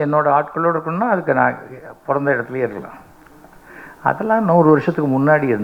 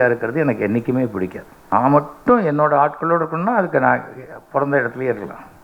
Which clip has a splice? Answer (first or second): second